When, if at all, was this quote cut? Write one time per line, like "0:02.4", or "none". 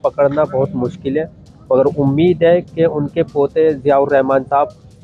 none